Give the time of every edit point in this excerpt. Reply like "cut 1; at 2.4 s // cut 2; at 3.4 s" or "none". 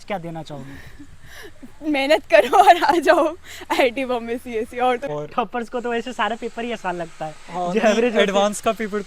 cut 1; at 5.1 s